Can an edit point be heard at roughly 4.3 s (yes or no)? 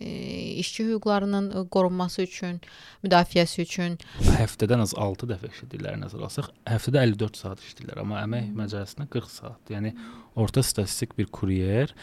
yes